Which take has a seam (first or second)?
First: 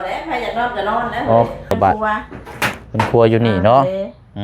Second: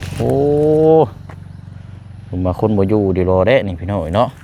first